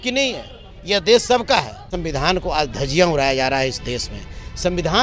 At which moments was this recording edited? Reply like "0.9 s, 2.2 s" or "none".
1.9 s